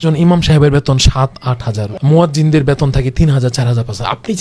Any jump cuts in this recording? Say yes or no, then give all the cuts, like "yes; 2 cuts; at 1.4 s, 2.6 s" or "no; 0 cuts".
yes; 1 cut; at 1.8 s